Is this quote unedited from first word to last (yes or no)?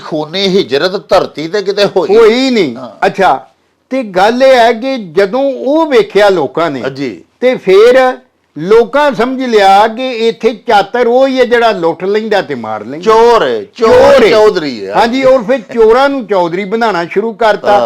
yes